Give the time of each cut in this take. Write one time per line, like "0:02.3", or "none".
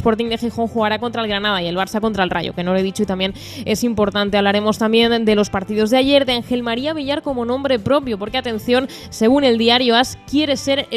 0:08.8